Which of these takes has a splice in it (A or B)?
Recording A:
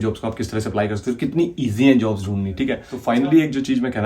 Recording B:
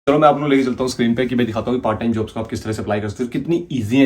A